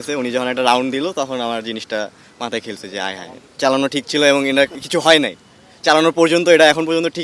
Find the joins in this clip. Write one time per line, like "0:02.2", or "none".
0:03.4